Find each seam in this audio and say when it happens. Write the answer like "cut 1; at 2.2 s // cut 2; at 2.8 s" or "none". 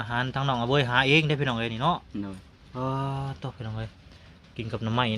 none